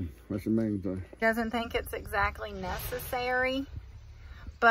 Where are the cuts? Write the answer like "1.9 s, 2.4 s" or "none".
1.1 s